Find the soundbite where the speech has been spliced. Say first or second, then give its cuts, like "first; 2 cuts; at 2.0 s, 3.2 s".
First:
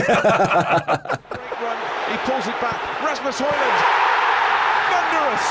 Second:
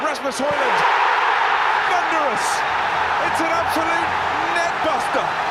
first; 1 cut; at 1.6 s